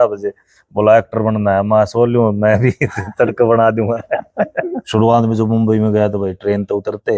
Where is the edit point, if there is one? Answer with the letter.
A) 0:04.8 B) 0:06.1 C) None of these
A